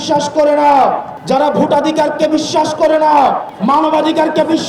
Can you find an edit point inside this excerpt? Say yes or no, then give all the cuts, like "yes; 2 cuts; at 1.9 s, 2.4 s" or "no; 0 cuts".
yes; 2 cuts; at 1.1 s, 3.5 s